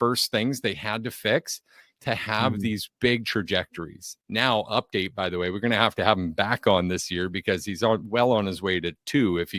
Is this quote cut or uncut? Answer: cut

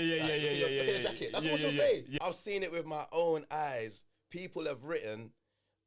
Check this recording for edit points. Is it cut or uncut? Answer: cut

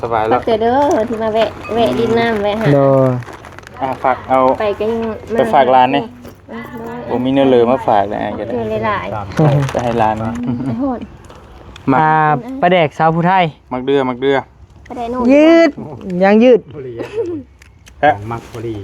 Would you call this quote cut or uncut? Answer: cut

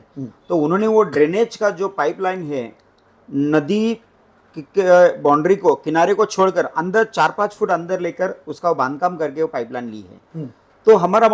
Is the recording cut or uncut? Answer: uncut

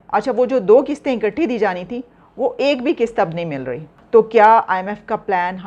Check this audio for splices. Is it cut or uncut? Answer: uncut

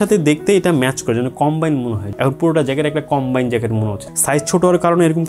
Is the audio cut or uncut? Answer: cut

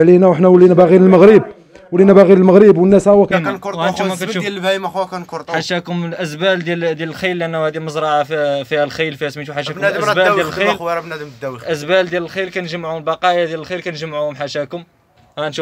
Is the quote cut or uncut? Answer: cut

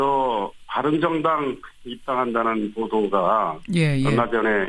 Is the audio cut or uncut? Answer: uncut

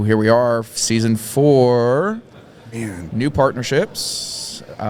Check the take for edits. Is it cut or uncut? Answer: uncut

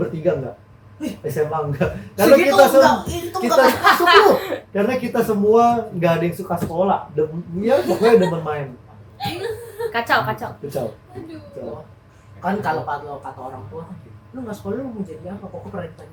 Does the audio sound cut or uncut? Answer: uncut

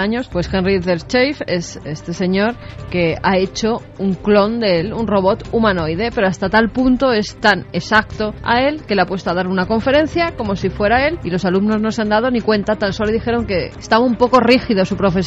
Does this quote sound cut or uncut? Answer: uncut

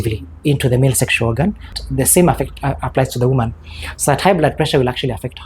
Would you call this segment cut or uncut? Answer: cut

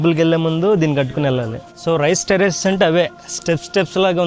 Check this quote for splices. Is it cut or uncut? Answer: cut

